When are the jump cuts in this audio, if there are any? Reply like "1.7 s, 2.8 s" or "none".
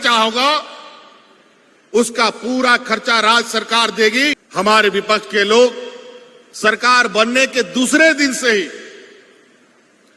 4.4 s